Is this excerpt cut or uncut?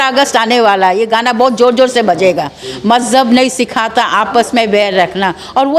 uncut